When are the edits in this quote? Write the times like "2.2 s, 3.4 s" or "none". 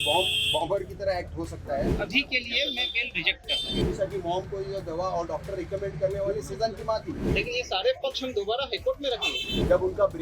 1.9 s, 3.8 s, 7.2 s, 9.4 s

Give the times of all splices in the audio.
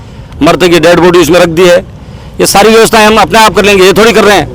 none

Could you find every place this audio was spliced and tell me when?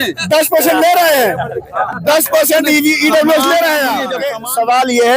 4.2 s

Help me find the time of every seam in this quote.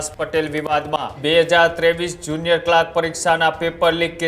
1.1 s

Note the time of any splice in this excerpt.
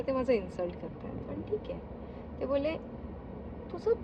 none

